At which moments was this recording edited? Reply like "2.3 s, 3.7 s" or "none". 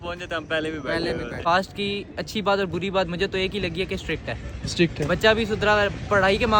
1.4 s